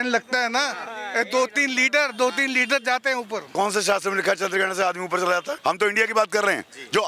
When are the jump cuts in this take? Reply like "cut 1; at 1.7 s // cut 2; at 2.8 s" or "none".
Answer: cut 1; at 3.5 s // cut 2; at 5.5 s

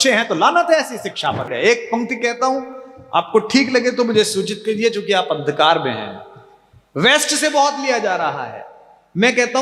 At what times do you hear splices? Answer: cut 1; at 1.5 s

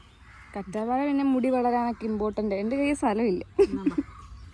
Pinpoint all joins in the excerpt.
none

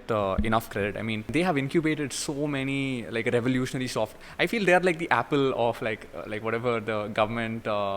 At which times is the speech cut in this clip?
cut 1; at 1.3 s

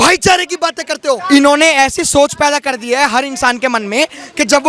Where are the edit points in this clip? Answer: cut 1; at 1.2 s

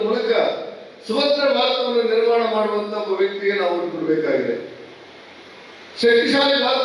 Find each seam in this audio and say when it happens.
none

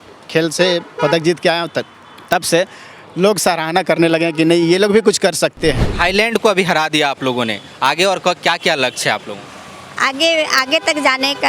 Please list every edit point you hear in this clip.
cut 1; at 5.9 s

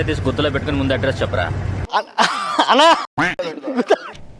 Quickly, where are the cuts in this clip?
cut 1; at 3.0 s

